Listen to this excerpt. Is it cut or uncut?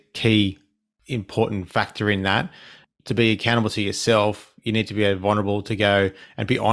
uncut